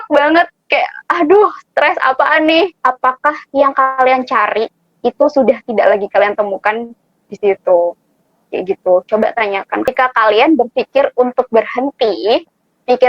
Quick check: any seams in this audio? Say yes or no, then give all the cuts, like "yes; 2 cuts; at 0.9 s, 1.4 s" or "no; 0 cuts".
yes; 2 cuts; at 2.7 s, 9.9 s